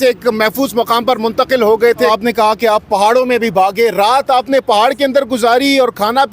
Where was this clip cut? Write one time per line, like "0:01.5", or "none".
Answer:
0:02.1